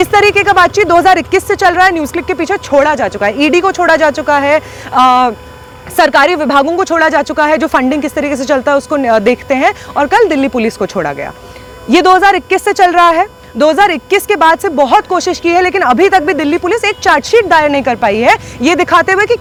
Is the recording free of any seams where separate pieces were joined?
yes; 0 cuts

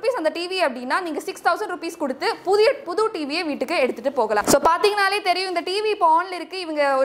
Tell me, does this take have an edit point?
yes; 1 cut; at 4.4 s

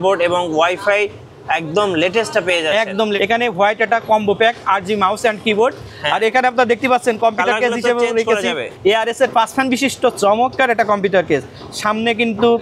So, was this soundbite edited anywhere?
yes; 2 cuts; at 3.2 s, 8.7 s

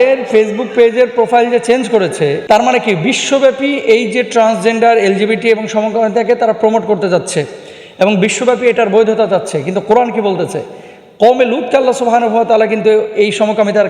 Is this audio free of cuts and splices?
no; 1 cut; at 2.4 s

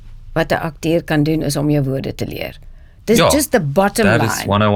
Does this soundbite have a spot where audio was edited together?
no; 0 cuts

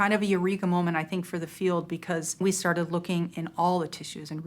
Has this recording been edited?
yes; 1 cut; at 2.4 s

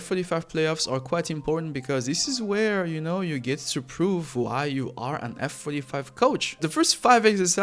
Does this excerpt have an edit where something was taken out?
yes; 1 cut; at 6.6 s

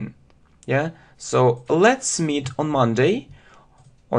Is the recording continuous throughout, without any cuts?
no; 1 cut; at 2.5 s

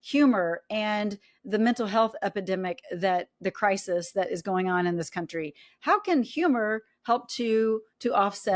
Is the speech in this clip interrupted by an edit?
no; 0 cuts

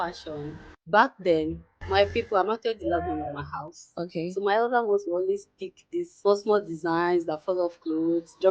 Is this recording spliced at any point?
yes; 1 cut; at 6.1 s

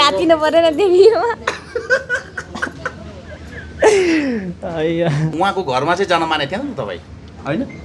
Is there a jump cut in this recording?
yes; 1 cut; at 5.3 s

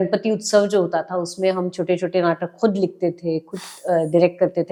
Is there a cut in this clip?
no; 0 cuts

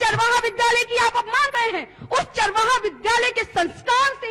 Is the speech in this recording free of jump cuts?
no; 1 cut; at 1.5 s

